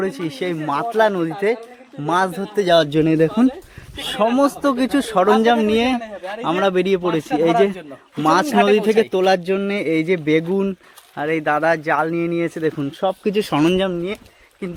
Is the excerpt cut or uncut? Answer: uncut